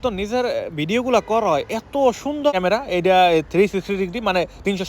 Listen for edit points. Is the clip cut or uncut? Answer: cut